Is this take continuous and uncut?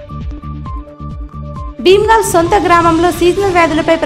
no; 1 cut; at 1.1 s

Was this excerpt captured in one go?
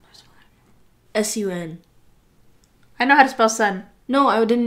no; 1 cut; at 1.0 s

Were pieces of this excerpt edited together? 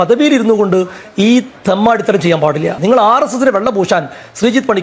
no; 0 cuts

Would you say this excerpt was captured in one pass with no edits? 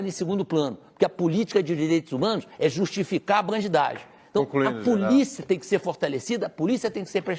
yes; 0 cuts

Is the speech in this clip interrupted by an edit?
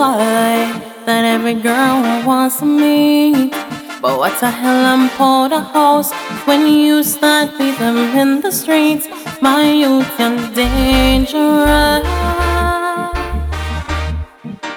no; 0 cuts

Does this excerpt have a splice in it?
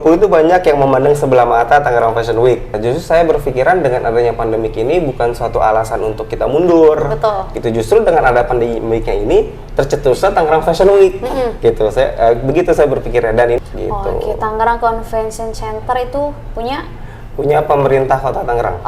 yes; 2 cuts; at 2.7 s, 13.6 s

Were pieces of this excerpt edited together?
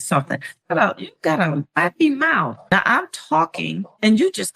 yes; 1 cut; at 2.6 s

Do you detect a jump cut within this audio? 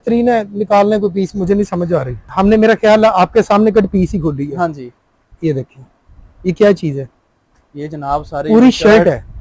yes; 1 cut; at 2.2 s

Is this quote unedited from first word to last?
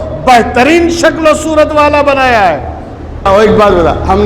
no; 1 cut; at 3.3 s

